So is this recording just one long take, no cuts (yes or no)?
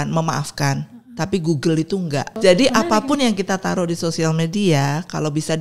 no